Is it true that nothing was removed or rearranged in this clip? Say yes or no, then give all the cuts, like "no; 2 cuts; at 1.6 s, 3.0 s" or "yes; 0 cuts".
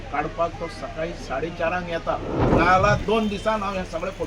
no; 1 cut; at 2.4 s